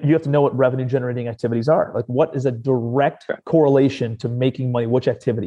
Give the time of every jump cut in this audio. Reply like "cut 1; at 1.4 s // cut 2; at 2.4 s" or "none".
cut 1; at 3.4 s